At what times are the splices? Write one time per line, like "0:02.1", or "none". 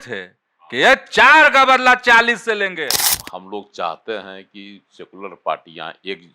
0:03.0